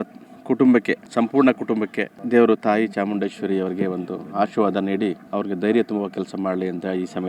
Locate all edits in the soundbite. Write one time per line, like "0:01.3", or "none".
0:05.2